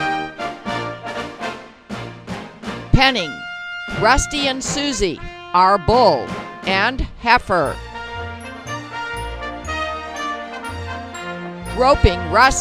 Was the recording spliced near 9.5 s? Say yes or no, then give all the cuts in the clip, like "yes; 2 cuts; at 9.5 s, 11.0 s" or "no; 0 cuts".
no; 1 cut; at 1.6 s